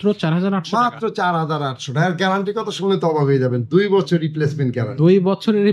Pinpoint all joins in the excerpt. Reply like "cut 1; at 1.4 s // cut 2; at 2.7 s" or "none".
none